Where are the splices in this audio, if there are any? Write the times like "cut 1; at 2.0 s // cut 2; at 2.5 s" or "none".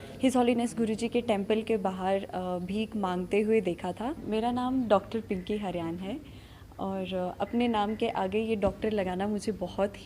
cut 1; at 4.2 s